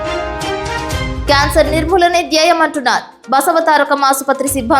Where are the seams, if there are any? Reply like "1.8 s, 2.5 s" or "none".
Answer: 1.2 s